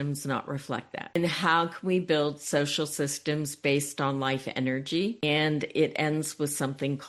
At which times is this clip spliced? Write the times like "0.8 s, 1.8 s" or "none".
1.1 s, 5.2 s